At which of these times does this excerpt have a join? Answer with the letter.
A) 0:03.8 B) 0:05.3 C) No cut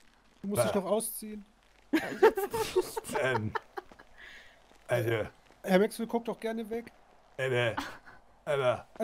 C